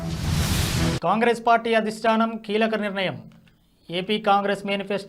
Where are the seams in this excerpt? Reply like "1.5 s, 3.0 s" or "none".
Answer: 1.4 s